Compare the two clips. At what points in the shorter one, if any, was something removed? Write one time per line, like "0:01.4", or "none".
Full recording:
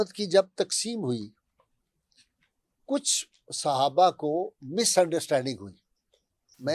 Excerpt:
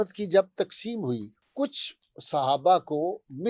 0:01.4